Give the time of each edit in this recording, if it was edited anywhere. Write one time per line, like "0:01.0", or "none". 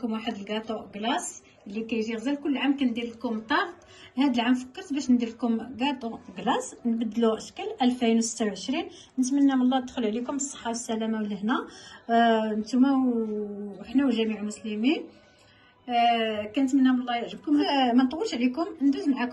0:17.7